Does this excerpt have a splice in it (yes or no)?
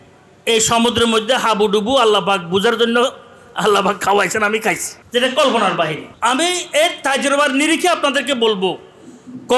yes